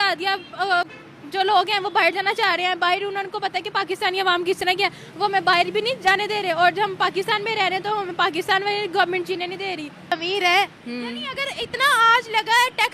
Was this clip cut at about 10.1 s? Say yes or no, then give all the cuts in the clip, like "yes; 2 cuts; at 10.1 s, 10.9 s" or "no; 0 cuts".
yes; 1 cut; at 10.1 s